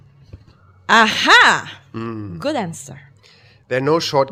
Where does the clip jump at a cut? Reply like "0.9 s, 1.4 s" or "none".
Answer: none

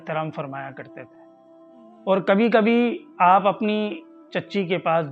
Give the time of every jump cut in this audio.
none

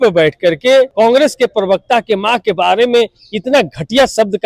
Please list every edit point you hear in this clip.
0.9 s

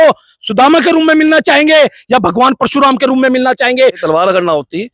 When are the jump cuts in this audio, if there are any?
4.0 s

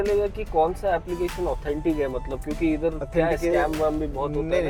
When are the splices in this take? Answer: none

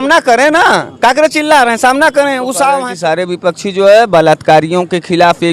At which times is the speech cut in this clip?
2.9 s

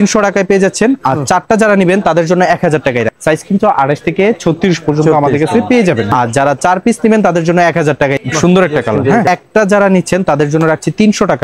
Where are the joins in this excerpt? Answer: 3.1 s, 6.1 s, 8.2 s, 9.3 s

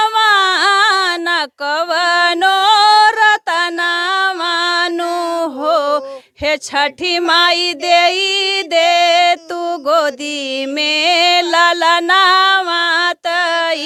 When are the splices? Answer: none

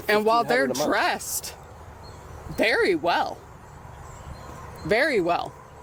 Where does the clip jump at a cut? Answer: none

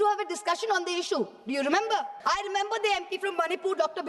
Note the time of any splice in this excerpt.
2.1 s

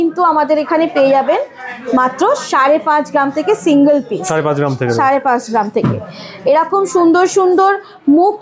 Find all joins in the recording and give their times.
none

